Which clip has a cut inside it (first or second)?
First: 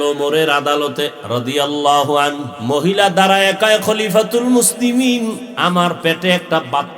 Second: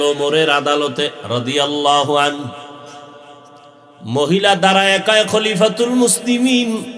first